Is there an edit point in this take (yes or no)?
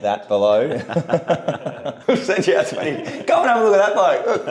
yes